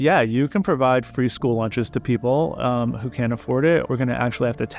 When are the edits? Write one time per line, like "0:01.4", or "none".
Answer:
0:03.9